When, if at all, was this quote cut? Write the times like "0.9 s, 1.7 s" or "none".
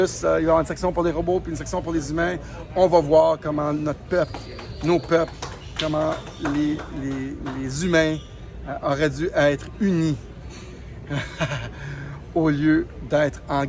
none